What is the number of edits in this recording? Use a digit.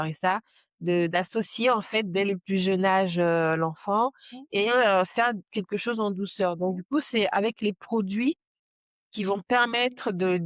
0